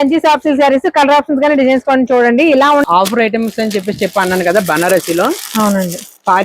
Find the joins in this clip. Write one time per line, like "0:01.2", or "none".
0:02.8

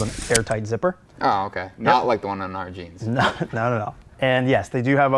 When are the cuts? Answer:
0:01.1
0:04.1

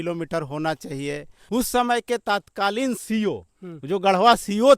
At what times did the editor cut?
0:01.3

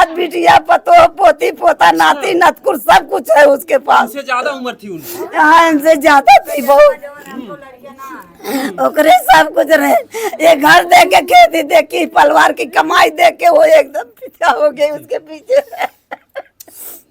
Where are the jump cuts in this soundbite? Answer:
none

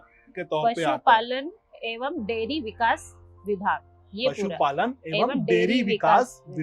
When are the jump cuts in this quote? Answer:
none

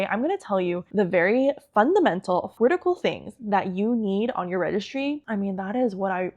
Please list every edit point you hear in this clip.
0:00.8
0:02.5
0:05.2

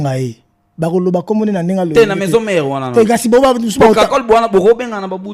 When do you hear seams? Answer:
none

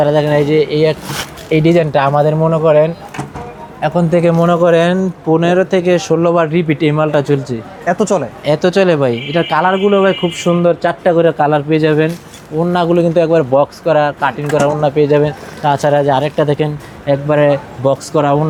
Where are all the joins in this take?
none

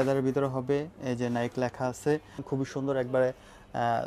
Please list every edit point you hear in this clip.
0:02.4

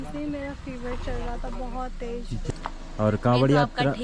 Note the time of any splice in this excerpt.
0:02.5

